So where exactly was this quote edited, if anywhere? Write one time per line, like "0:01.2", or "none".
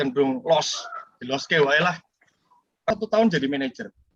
0:02.9